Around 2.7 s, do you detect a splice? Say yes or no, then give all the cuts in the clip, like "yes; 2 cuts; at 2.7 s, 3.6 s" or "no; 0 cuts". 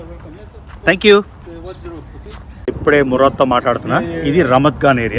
yes; 1 cut; at 2.7 s